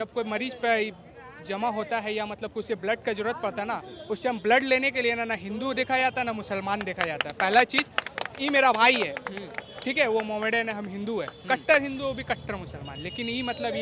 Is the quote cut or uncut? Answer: uncut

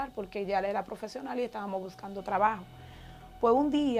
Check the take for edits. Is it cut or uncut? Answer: uncut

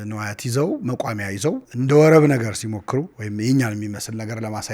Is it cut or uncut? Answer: cut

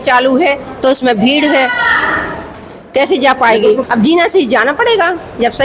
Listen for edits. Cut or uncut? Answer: cut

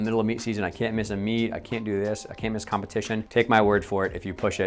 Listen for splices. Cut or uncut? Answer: uncut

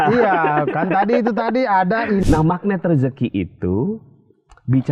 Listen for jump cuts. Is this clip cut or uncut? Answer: cut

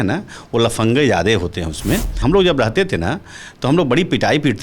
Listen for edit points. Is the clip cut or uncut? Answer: cut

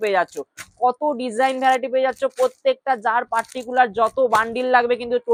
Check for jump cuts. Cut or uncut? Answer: uncut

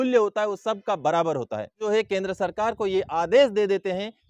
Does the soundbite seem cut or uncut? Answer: cut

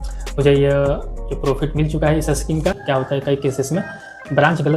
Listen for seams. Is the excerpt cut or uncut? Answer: cut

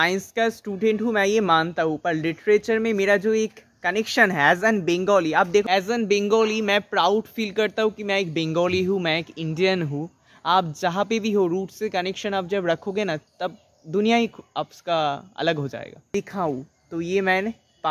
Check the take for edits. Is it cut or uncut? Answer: cut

